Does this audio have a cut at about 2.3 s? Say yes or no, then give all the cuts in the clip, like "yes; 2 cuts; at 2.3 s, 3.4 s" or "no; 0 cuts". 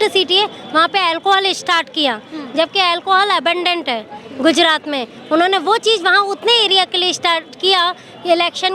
no; 0 cuts